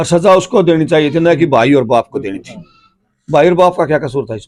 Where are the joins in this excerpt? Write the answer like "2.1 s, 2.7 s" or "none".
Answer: none